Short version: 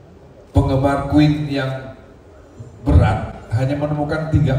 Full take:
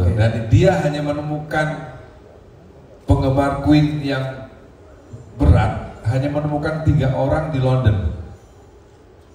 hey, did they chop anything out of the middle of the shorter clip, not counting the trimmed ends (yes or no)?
no